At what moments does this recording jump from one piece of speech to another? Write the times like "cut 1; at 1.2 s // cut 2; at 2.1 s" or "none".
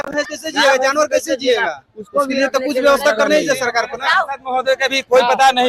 none